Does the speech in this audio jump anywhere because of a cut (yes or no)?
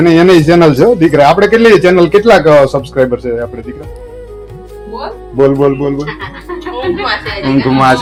no